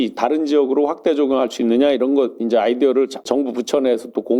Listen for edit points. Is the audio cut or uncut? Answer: cut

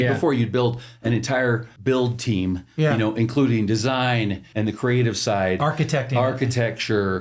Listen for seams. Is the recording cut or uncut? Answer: cut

